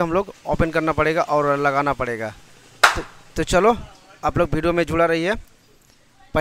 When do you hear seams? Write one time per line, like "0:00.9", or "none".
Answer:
none

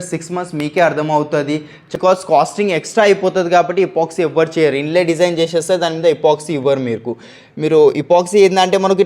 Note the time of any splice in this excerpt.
0:01.9

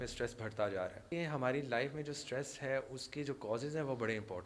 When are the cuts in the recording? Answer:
0:01.1

